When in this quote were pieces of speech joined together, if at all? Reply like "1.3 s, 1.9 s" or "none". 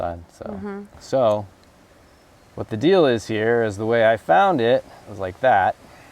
0.9 s